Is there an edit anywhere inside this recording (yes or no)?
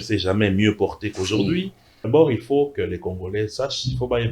yes